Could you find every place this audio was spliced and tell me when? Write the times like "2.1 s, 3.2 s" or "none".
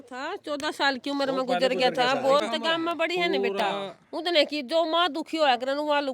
2.4 s